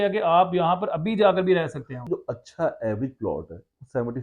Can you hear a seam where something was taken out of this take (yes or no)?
yes